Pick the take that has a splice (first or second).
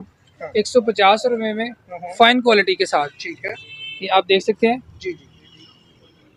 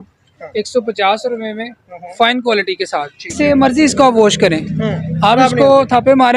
second